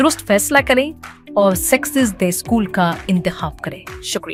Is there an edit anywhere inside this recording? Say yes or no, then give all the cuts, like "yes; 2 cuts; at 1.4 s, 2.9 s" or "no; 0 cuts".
no; 0 cuts